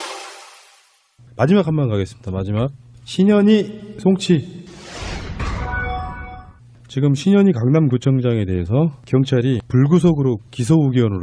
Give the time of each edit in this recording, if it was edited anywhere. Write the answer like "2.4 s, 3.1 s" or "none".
6.7 s